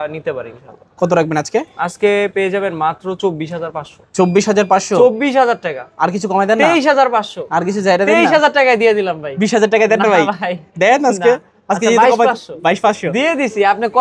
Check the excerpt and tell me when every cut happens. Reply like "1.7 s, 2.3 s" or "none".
none